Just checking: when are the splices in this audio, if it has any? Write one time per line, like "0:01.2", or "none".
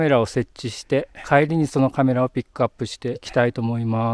0:01.2
0:03.2